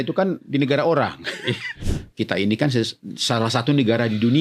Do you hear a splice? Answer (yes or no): yes